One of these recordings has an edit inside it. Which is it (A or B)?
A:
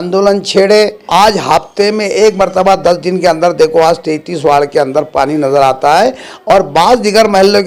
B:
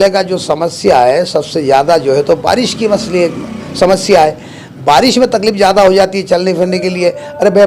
A